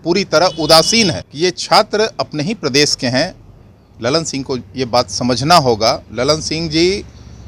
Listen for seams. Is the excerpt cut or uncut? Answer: cut